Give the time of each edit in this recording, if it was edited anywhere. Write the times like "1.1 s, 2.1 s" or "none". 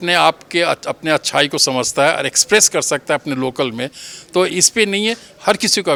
none